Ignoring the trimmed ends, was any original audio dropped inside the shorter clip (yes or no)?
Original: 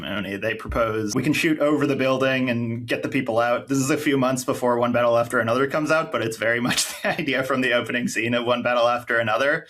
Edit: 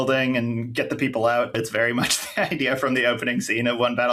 yes